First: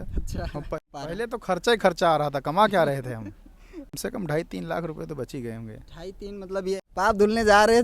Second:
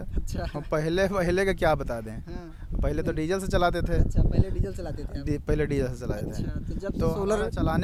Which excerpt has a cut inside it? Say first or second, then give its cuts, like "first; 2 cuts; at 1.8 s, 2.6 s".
first; 3 cuts; at 0.8 s, 3.9 s, 6.8 s